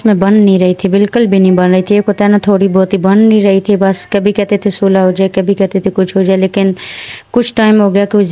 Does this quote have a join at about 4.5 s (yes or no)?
no